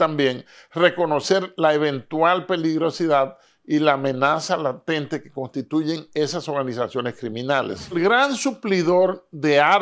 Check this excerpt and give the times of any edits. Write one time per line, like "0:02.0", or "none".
0:08.0